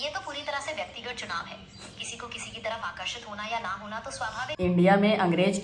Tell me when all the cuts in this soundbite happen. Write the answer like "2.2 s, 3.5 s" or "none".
4.6 s

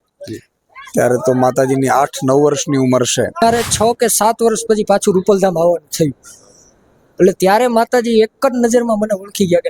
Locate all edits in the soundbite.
3.4 s

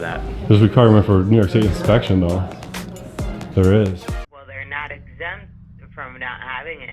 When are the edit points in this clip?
4.3 s

